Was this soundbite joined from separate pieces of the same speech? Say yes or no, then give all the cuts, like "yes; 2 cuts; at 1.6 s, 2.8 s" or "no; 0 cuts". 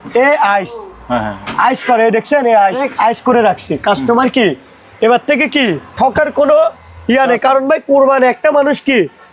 yes; 1 cut; at 2.9 s